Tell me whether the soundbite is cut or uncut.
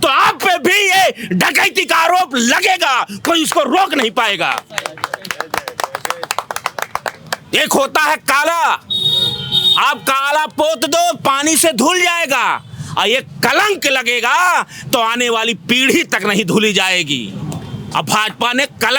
uncut